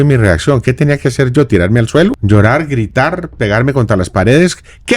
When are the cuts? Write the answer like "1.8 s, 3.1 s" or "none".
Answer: 2.2 s

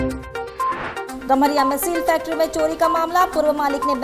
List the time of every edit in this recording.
1.1 s

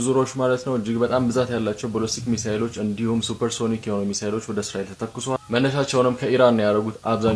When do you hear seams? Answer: none

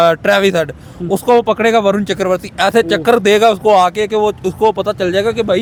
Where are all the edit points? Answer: none

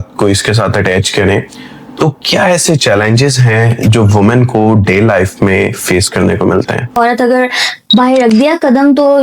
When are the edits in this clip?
7.0 s

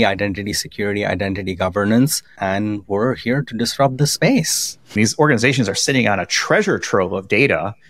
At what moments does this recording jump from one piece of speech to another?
2.3 s, 5.0 s

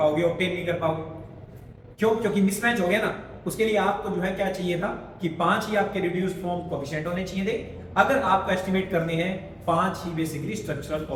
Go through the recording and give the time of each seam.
none

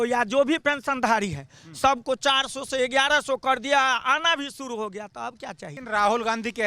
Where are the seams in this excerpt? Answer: 5.7 s

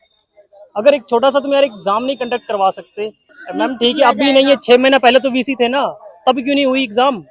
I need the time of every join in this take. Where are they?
none

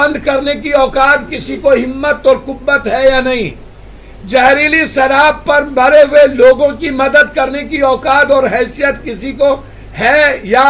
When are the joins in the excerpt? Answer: none

